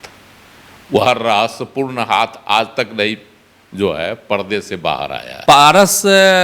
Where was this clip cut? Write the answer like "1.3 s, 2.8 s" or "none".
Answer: 5.3 s